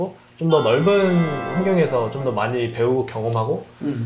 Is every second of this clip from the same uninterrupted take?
yes; 0 cuts

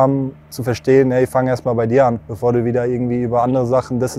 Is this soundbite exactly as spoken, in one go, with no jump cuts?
no; 1 cut; at 2.3 s

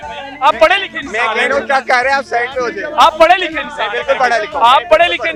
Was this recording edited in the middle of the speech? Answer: no; 0 cuts

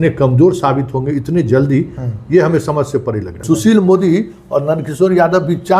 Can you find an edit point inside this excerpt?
yes; 1 cut; at 3.3 s

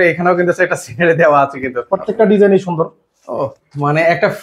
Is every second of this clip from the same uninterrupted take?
no; 1 cut; at 1.8 s

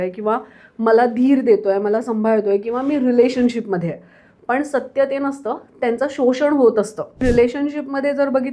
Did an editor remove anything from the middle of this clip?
yes; 1 cut; at 7.2 s

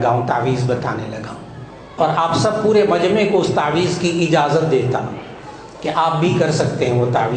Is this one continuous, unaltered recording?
no; 1 cut; at 1.9 s

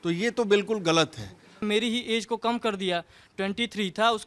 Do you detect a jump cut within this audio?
yes; 1 cut; at 1.6 s

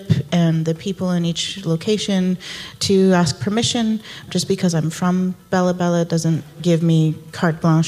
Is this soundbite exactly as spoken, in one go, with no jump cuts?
no; 2 cuts; at 4.3 s, 6.6 s

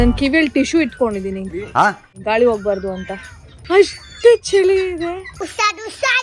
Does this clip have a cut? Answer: yes; 3 cuts; at 1.4 s, 2.1 s, 3.6 s

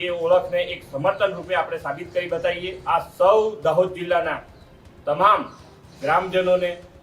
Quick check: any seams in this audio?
yes; 1 cut; at 2.7 s

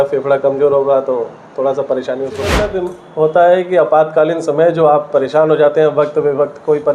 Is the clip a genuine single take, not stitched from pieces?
no; 1 cut; at 2.6 s

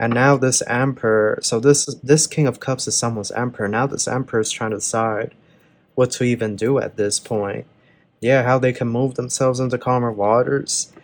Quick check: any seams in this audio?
no; 0 cuts

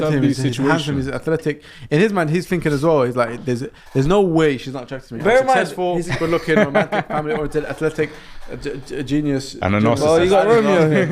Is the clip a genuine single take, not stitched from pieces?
yes; 0 cuts

